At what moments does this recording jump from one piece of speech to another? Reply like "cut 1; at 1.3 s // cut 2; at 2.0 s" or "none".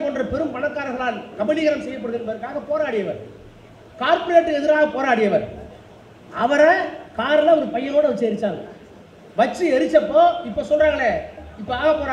none